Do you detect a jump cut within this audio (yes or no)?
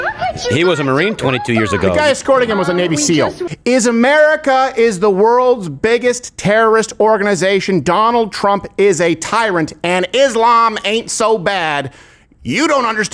yes